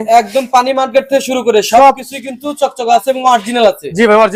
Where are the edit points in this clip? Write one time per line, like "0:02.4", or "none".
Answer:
none

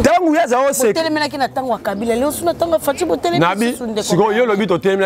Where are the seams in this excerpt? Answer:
none

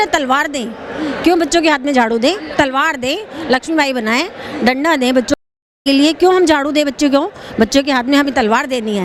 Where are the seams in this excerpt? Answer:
none

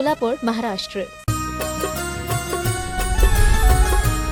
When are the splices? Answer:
none

